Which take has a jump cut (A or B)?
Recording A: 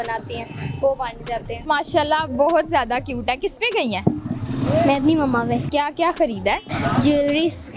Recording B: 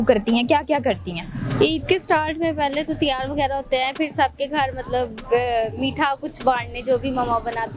A